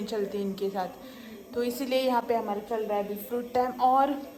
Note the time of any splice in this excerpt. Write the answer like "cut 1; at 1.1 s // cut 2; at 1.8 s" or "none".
none